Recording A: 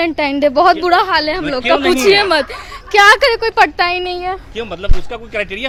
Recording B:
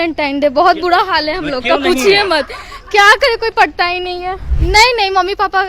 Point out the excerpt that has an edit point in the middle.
B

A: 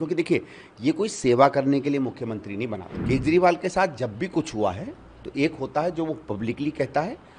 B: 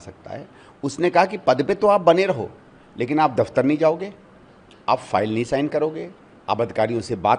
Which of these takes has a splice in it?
A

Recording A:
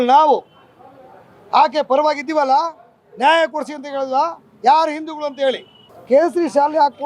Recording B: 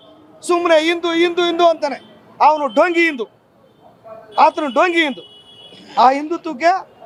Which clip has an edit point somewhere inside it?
A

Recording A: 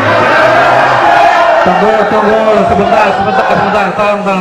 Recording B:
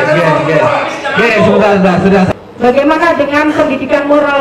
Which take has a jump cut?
B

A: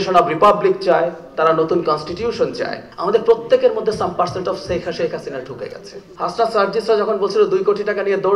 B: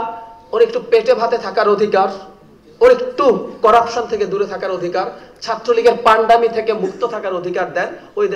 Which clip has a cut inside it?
A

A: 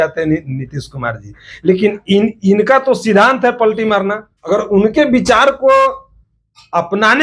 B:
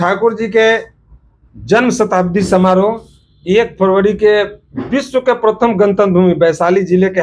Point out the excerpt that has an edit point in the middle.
A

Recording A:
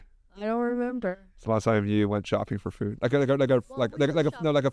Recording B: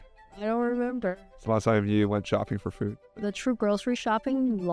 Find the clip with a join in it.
B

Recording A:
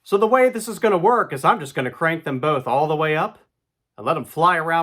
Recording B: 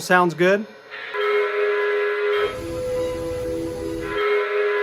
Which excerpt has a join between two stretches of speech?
B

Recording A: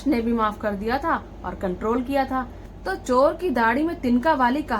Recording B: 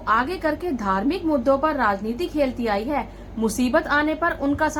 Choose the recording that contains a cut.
A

